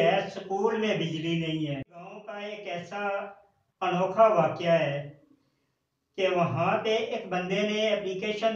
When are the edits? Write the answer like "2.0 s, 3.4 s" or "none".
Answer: 1.8 s